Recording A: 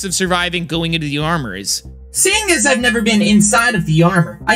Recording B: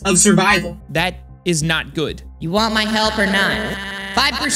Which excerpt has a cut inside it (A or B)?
A